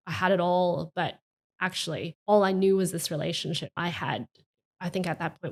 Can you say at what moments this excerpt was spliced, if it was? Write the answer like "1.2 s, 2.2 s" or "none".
none